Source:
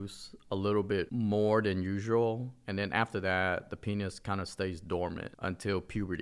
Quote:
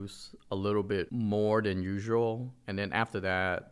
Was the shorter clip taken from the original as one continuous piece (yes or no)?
yes